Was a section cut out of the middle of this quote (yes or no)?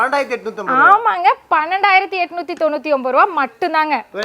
no